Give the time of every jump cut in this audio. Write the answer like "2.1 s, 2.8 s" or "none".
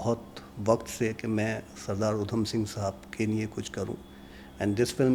none